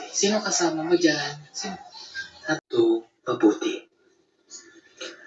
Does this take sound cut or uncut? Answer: cut